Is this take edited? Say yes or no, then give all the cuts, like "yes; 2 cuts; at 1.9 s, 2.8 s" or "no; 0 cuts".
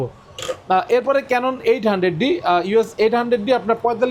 no; 0 cuts